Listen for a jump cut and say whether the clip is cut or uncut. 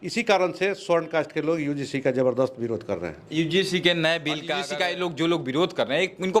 cut